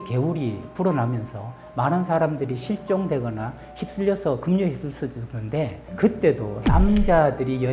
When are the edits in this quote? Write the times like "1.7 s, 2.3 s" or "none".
6.5 s

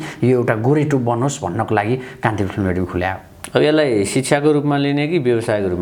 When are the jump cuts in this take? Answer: none

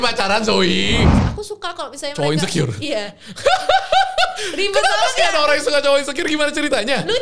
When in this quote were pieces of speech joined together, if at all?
1.1 s

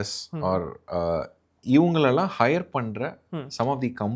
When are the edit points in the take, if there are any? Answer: none

